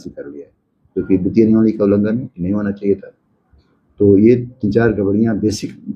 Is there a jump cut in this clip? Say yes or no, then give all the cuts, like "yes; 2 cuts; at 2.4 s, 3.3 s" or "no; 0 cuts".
no; 0 cuts